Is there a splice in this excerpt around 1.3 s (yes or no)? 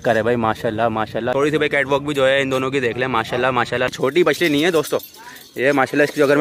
yes